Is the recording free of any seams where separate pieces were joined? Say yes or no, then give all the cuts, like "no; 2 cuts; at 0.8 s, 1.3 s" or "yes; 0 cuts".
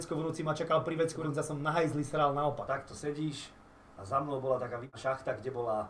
no; 3 cuts; at 1.2 s, 2.6 s, 4.9 s